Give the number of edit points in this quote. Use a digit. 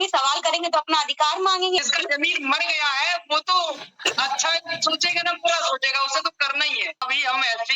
2